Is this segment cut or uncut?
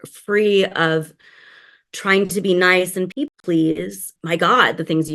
cut